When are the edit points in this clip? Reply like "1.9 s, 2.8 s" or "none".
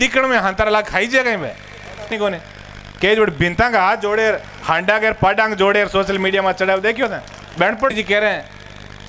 2.1 s, 7.9 s